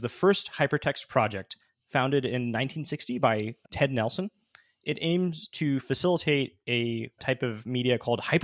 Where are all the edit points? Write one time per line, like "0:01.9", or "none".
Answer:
0:03.6
0:07.2